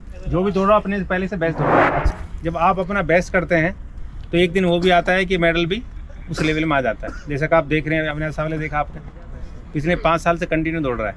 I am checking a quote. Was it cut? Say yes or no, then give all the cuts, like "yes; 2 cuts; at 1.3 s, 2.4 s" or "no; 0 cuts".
yes; 1 cut; at 2.1 s